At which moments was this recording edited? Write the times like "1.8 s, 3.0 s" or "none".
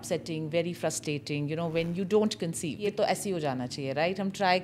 2.8 s